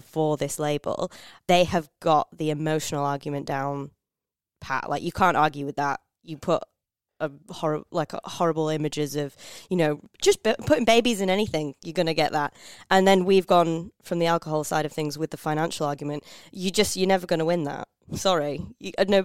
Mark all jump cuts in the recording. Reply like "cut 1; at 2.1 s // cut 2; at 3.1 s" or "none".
cut 1; at 1.3 s